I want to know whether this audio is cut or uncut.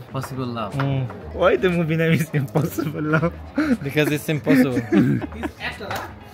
uncut